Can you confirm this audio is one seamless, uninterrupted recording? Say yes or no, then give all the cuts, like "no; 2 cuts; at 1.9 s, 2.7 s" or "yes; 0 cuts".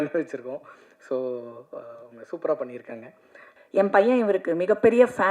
no; 1 cut; at 3.6 s